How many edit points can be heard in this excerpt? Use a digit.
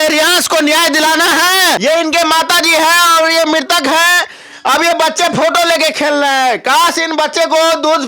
1